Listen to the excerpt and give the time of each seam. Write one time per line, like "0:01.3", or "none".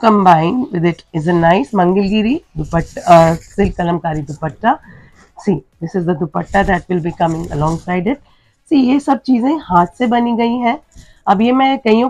none